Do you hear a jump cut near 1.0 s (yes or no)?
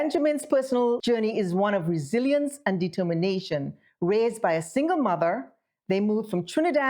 yes